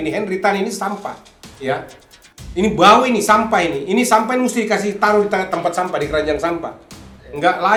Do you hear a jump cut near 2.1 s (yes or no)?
no